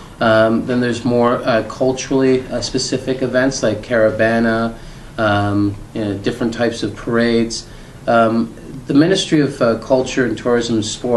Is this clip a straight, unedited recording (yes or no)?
yes